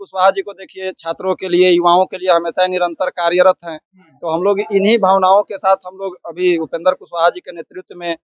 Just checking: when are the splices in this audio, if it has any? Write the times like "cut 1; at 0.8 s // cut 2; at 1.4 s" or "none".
none